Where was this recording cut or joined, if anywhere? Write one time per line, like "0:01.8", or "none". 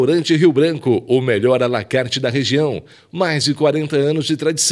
none